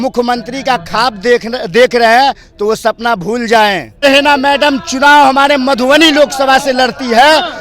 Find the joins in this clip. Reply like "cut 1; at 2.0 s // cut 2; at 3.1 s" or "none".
cut 1; at 4.0 s